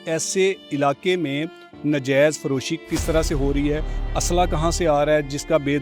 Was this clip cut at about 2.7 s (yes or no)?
yes